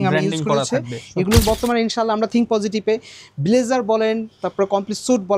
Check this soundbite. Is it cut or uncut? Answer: cut